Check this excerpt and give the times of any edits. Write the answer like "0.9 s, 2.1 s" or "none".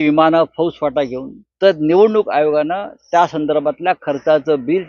none